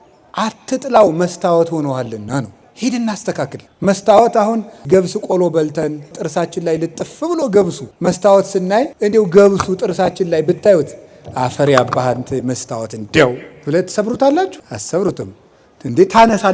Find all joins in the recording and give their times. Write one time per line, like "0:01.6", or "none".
0:02.6
0:03.6
0:04.9
0:06.2
0:07.8
0:08.9
0:14.7

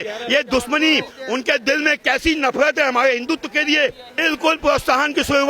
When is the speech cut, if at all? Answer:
0:04.1

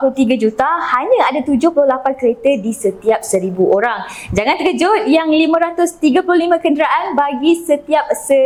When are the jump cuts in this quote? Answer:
none

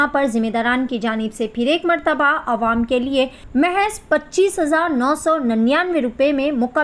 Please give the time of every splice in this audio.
0:03.4

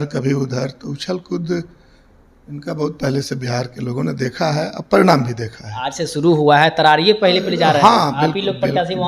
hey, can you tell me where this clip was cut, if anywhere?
none

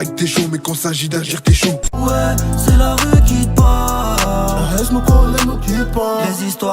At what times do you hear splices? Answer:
0:01.9

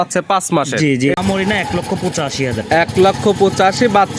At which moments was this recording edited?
0:01.1

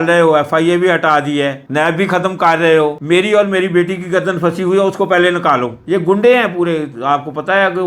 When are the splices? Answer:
0:05.7

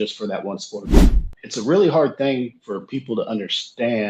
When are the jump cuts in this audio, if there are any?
0:01.1

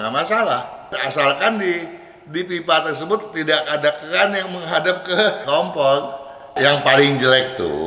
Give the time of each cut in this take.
0:01.0
0:05.4
0:06.5

